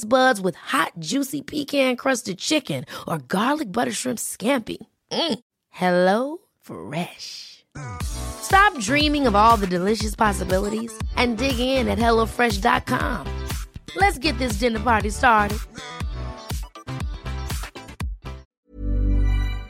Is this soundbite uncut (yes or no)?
no